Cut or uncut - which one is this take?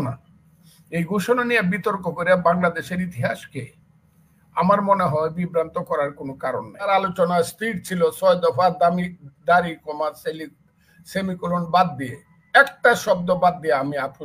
cut